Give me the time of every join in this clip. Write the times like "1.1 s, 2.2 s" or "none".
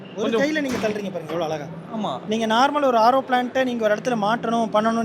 2.2 s